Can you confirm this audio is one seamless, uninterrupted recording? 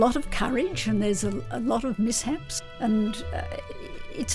no; 1 cut; at 2.5 s

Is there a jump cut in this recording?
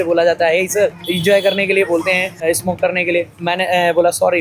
yes; 3 cuts; at 1.1 s, 2.4 s, 3.3 s

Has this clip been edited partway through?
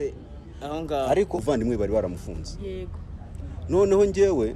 yes; 1 cut; at 1.4 s

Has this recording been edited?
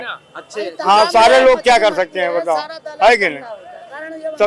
no; 0 cuts

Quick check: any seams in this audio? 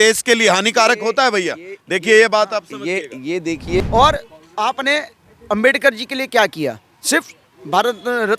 yes; 1 cut; at 3.8 s

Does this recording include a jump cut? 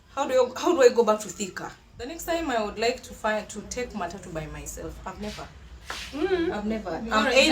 yes; 1 cut; at 2.1 s

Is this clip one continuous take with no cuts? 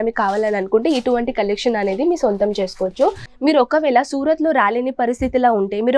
no; 1 cut; at 3.3 s

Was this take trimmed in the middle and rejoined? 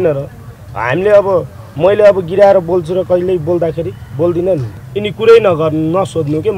yes; 1 cut; at 4.7 s

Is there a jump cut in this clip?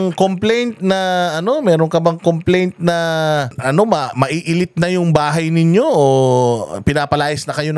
yes; 1 cut; at 3.6 s

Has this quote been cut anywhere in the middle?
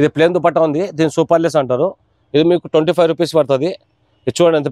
no; 0 cuts

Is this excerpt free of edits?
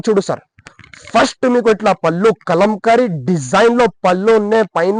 yes; 0 cuts

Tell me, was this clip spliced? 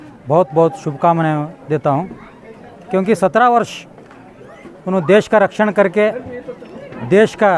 no; 0 cuts

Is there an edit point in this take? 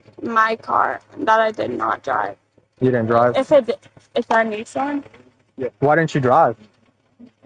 no; 0 cuts

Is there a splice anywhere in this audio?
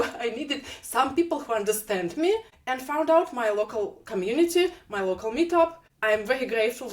yes; 2 cuts; at 2.6 s, 5.9 s

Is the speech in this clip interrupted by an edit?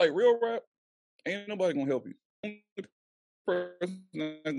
yes; 1 cut; at 2.5 s

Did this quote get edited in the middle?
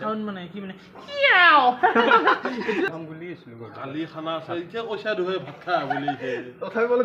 yes; 1 cut; at 2.9 s

